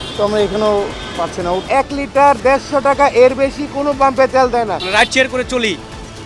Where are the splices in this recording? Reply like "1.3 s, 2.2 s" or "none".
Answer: 1.6 s, 4.8 s